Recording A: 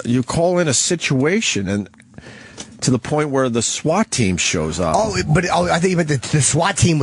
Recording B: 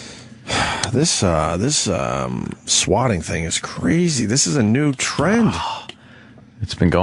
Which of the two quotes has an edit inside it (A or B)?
A